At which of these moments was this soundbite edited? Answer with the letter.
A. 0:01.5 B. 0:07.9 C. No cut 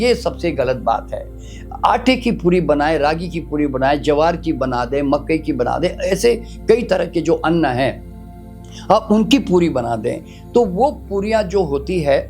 C